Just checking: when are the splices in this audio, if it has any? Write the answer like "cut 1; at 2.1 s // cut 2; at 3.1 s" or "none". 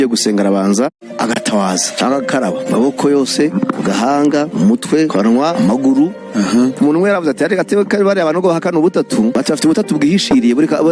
cut 1; at 1.0 s